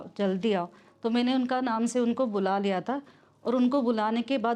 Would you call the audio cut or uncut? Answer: uncut